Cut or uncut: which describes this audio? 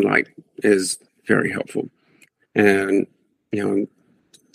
cut